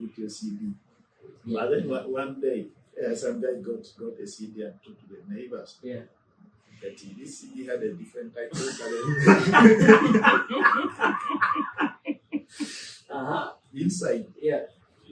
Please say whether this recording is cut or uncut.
uncut